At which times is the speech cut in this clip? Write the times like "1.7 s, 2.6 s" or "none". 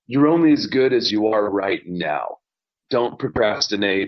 2.6 s